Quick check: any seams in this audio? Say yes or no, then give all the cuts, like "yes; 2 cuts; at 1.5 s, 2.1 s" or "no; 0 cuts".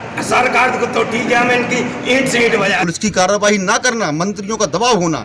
yes; 1 cut; at 2.8 s